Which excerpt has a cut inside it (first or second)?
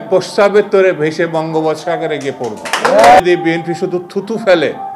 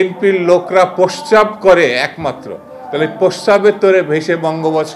first